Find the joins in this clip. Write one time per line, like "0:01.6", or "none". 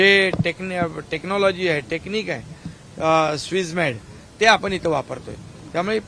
none